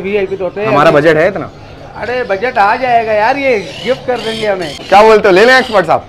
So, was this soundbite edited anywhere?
yes; 1 cut; at 4.8 s

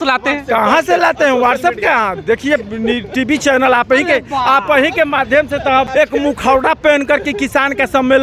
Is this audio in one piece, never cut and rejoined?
no; 1 cut; at 5.9 s

